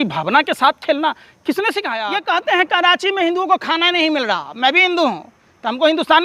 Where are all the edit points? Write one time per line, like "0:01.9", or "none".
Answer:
0:01.9